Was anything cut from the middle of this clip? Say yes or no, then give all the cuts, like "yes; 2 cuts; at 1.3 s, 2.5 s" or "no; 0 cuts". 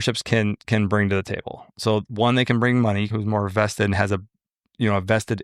yes; 1 cut; at 3.1 s